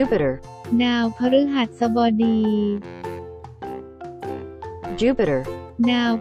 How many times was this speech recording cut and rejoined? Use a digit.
2